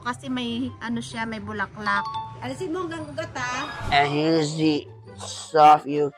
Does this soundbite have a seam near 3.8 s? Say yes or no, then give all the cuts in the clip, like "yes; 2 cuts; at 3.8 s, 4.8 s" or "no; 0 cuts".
yes; 2 cuts; at 2.3 s, 3.8 s